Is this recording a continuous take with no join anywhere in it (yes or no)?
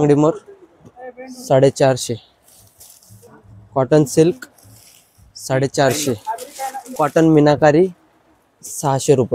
no